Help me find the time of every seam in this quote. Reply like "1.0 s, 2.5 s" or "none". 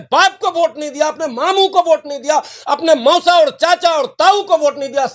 none